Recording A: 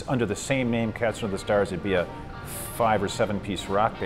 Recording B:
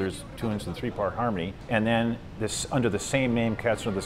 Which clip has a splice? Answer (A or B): B